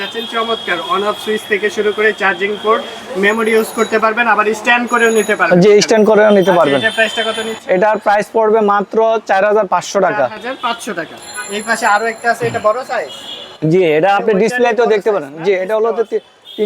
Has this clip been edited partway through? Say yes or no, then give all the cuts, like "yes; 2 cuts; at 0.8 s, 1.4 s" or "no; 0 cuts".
no; 0 cuts